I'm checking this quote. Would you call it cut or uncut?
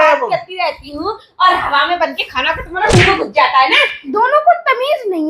cut